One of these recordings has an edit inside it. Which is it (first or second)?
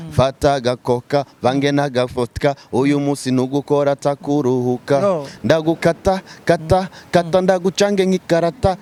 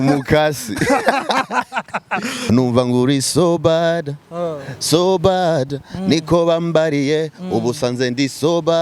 second